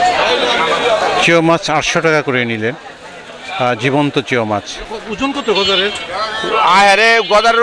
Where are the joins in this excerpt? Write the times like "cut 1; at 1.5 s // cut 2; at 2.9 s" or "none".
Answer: cut 1; at 4.9 s